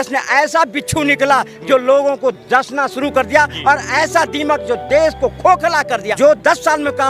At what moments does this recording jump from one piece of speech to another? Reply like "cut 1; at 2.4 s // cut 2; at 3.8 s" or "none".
cut 1; at 6.1 s